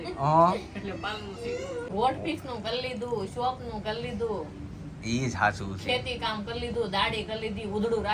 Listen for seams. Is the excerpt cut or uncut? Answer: cut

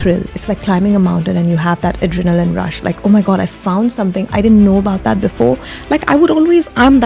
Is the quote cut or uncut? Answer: cut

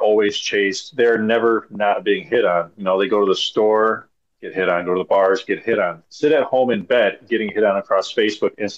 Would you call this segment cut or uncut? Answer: uncut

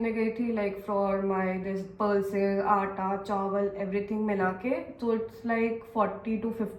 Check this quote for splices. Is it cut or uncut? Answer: uncut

